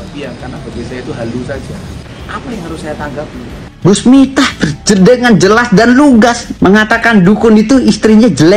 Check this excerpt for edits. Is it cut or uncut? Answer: cut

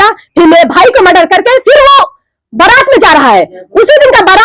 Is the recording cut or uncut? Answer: uncut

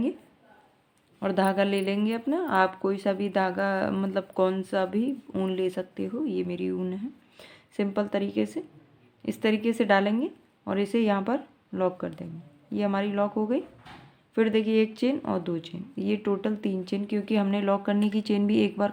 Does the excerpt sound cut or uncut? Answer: uncut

